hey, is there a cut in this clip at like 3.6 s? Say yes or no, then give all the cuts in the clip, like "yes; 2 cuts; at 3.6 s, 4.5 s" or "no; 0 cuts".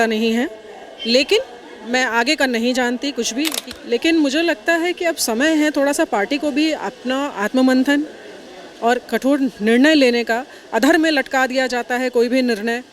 yes; 1 cut; at 3.6 s